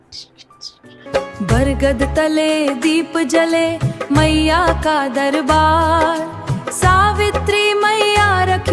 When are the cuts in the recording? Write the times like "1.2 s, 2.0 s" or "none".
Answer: 1.0 s